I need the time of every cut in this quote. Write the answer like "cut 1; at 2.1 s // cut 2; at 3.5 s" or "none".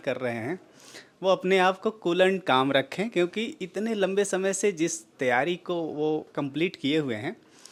none